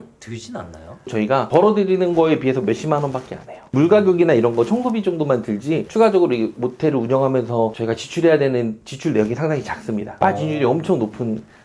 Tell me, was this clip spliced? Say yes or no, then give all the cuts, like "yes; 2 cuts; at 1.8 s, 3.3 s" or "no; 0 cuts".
yes; 1 cut; at 1.1 s